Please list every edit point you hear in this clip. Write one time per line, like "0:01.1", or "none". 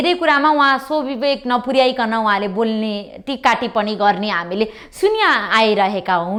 none